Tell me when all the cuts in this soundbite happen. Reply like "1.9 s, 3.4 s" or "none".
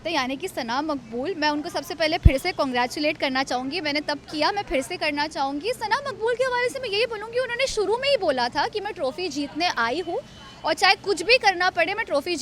none